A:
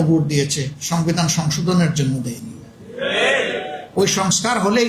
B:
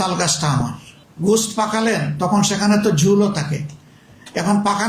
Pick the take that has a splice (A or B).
B